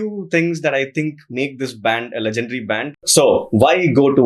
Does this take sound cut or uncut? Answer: cut